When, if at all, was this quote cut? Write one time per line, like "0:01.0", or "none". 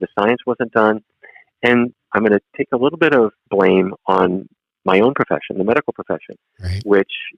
0:02.1
0:03.4